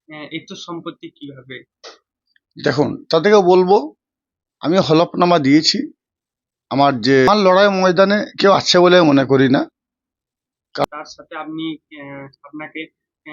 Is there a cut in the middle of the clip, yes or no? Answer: yes